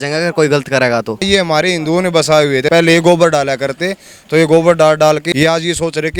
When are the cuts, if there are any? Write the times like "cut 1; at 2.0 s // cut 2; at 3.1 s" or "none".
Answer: cut 1; at 1.2 s // cut 2; at 2.7 s // cut 3; at 5.3 s